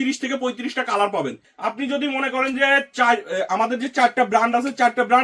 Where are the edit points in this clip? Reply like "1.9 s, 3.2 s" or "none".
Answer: 1.5 s